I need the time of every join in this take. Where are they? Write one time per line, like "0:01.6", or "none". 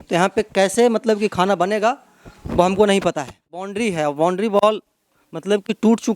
0:03.7